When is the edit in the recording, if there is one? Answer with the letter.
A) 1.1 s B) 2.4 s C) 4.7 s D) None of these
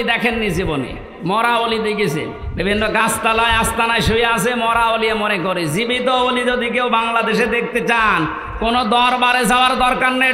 B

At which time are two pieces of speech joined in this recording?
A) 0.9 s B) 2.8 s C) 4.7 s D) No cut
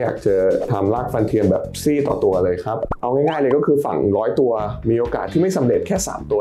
B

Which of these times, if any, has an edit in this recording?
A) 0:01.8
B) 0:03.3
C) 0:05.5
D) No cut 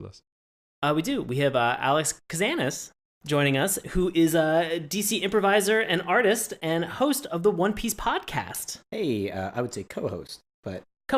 A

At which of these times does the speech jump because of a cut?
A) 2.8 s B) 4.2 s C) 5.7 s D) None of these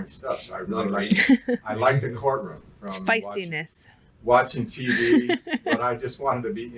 A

